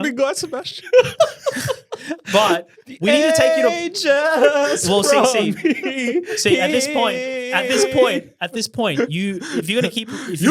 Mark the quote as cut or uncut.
uncut